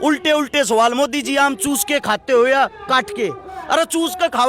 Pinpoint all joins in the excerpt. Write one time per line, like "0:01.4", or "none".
none